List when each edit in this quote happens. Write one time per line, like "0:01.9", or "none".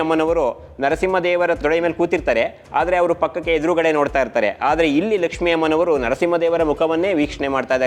0:01.6

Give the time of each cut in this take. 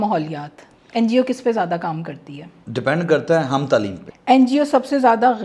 none

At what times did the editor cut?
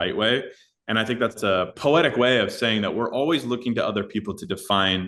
0:01.5

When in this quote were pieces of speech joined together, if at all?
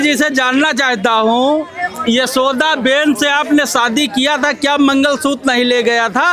none

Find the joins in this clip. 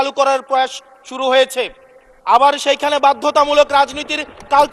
none

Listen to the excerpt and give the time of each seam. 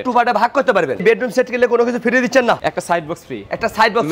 0:01.0
0:02.6

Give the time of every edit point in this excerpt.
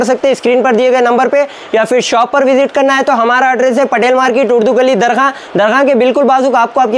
none

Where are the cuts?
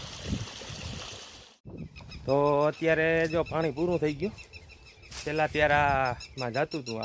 0:01.5

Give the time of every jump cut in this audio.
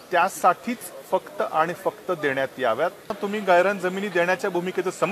0:03.1

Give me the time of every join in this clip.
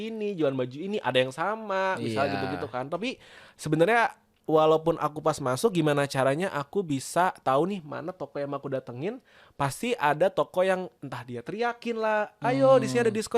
none

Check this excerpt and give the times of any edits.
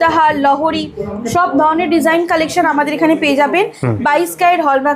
none

